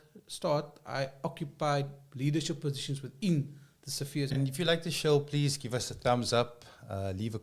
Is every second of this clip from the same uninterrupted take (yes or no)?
no